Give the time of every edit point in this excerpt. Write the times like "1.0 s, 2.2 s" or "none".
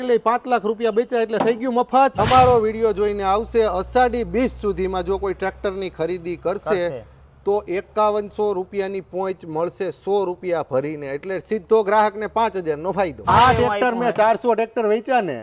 2.2 s, 13.2 s

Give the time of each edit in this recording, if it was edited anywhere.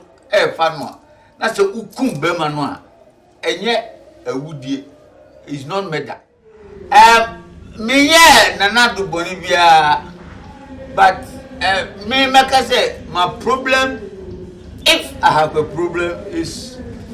6.7 s

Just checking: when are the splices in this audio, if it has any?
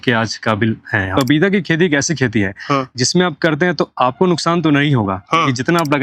1.1 s

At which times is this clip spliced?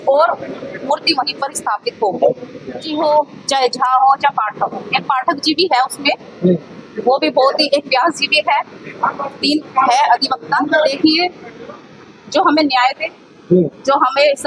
2.9 s, 10.9 s

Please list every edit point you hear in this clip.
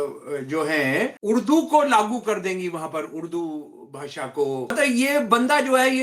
1.2 s, 4.7 s

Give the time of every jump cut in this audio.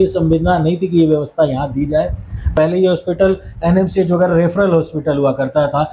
none

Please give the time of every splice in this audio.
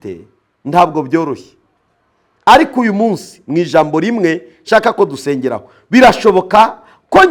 none

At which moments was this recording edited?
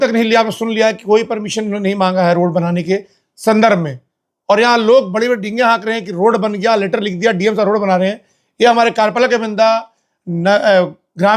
none

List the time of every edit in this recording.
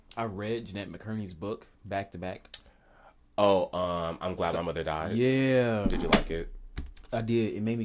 none

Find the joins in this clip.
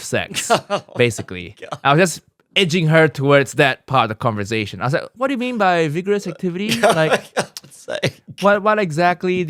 none

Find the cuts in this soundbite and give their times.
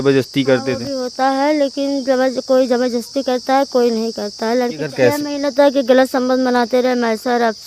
4.8 s

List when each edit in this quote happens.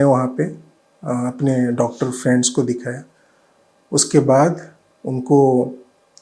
none

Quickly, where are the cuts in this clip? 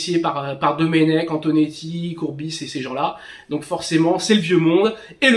none

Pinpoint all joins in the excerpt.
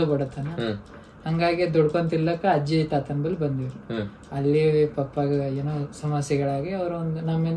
none

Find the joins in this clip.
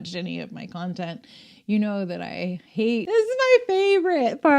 3.0 s

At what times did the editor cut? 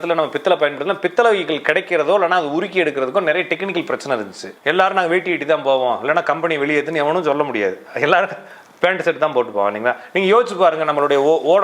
4.4 s

